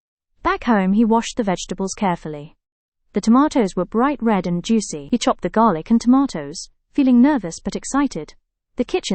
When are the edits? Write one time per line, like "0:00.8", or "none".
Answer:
0:05.0